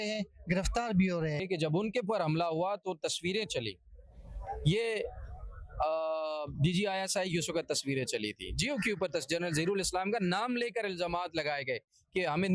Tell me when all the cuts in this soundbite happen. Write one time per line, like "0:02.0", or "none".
0:01.4